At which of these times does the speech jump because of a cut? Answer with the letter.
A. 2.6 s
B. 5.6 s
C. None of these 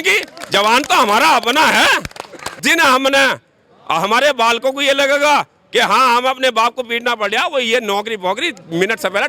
A